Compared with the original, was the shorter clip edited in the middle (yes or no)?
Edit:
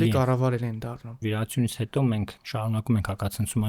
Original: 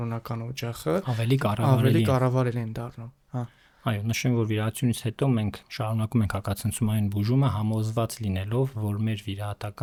yes